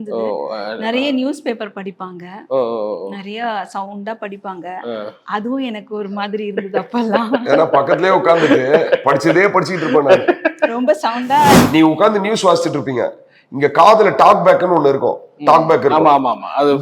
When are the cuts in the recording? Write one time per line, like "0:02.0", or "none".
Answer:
0:11.7